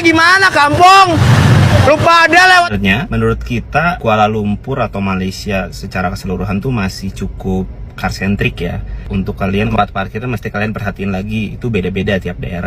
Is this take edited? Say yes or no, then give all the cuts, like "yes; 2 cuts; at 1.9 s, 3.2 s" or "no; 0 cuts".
yes; 2 cuts; at 2.7 s, 9.7 s